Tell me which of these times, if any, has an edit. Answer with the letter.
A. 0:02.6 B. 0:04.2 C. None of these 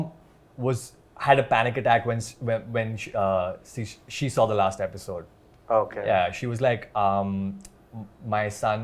C